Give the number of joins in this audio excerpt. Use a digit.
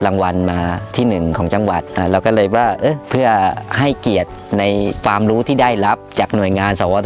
4